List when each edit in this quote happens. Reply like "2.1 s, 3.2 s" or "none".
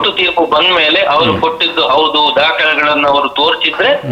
none